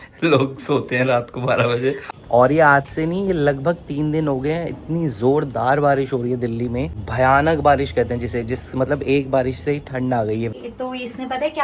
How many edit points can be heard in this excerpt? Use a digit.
3